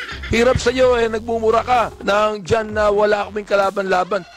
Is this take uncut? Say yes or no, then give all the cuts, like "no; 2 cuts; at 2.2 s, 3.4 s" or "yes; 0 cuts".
yes; 0 cuts